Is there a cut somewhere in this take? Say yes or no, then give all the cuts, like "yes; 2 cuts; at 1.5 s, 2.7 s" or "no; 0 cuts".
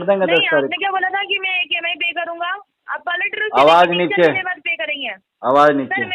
no; 0 cuts